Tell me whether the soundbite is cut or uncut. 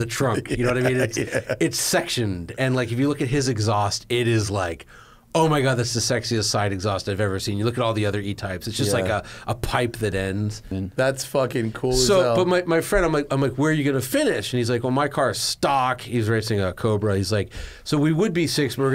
cut